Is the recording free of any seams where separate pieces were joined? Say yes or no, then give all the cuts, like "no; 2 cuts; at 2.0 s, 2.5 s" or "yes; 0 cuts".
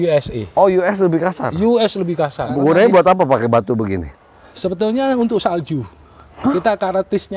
no; 1 cut; at 2.4 s